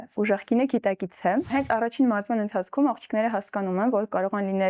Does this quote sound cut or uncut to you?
cut